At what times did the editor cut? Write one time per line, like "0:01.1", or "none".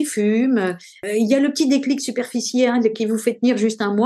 0:01.0

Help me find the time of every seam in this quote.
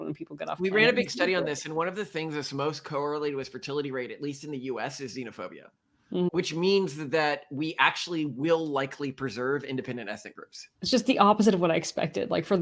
none

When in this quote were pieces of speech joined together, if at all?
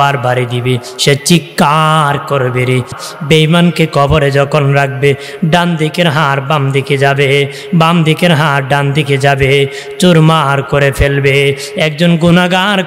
0:03.0

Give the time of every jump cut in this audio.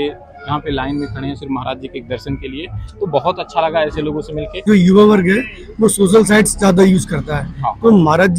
0:04.7

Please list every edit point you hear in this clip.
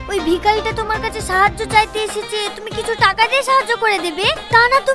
none

